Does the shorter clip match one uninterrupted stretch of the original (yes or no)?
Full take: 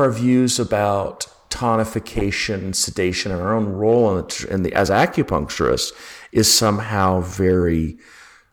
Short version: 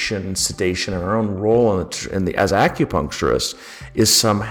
yes